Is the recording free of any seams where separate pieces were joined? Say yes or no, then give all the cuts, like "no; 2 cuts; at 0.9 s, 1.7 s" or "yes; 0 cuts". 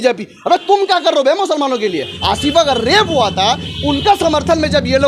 no; 1 cut; at 2.1 s